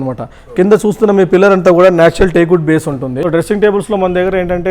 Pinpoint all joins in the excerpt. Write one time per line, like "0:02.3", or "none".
0:03.2